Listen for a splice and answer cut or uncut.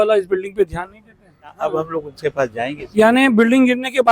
cut